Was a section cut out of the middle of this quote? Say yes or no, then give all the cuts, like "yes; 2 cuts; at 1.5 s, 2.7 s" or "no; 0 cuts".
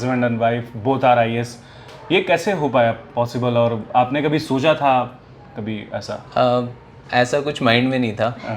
no; 0 cuts